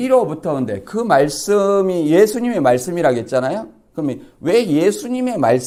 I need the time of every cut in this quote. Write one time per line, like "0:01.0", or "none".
none